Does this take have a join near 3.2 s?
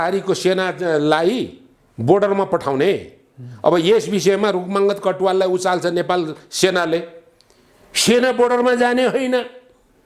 no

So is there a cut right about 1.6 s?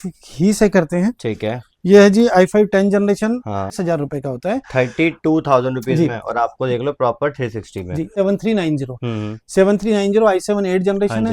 no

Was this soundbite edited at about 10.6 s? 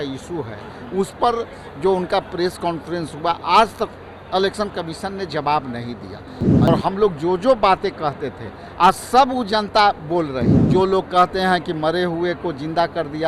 yes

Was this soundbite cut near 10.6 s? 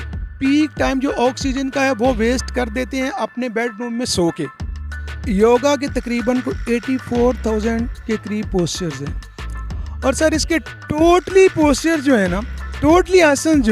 no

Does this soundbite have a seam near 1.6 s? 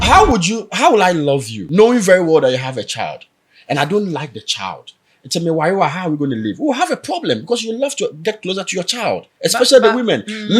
yes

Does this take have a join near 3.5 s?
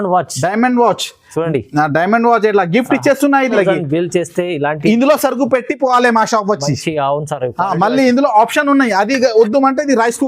yes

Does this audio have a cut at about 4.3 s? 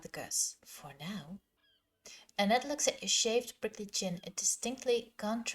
no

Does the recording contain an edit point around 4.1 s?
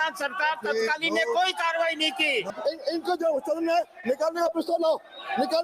no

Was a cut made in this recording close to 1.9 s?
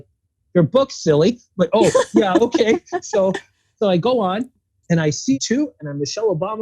no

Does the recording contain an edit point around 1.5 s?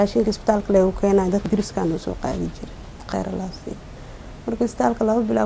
yes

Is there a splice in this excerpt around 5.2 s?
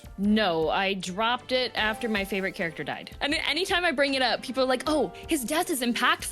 no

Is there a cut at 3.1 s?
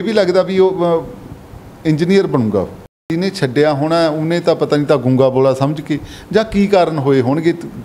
yes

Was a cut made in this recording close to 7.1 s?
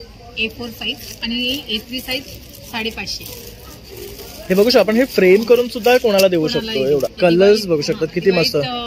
yes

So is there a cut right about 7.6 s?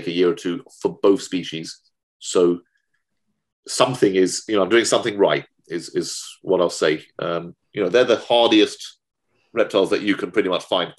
yes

